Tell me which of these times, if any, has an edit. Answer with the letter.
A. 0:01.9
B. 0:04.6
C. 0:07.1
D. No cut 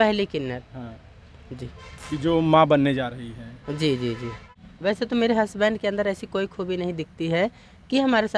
B